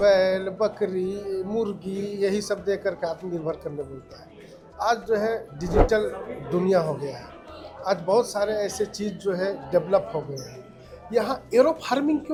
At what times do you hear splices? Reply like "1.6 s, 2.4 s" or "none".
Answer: none

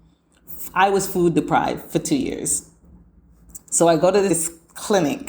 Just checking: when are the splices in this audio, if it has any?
4.3 s

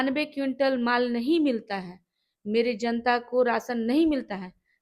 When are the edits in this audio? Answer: none

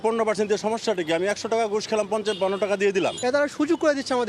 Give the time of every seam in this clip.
3.2 s

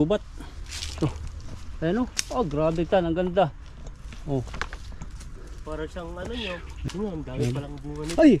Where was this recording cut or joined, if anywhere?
6.9 s

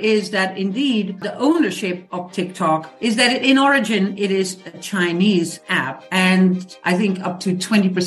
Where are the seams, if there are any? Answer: 1.2 s, 2.9 s, 6.0 s

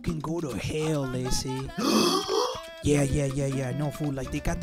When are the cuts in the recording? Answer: 1.7 s

